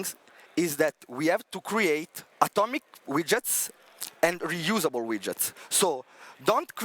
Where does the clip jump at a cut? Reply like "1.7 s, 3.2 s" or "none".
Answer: 2.2 s